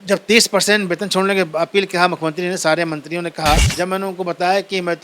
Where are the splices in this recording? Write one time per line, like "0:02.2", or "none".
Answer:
0:03.7